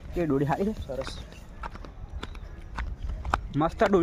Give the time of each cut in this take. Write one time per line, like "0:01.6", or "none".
none